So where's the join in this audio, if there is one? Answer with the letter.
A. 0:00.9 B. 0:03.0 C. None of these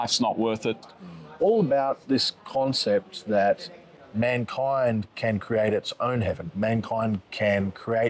A